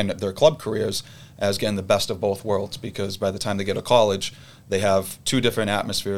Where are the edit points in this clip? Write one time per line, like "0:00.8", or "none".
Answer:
none